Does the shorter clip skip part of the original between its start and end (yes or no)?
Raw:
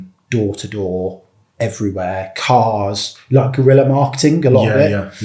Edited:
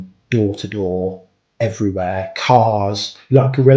no